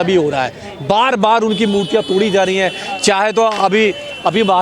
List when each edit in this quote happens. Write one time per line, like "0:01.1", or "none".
none